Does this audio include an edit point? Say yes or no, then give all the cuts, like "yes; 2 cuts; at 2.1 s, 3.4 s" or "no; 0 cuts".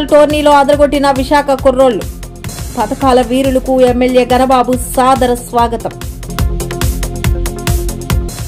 no; 0 cuts